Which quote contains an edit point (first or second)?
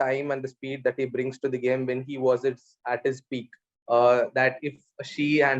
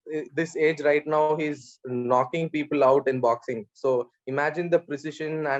first